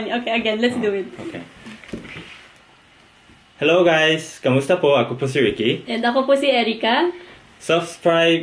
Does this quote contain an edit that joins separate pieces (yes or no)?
no